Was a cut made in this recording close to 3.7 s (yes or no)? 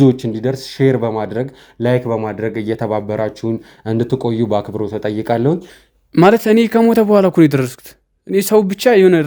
no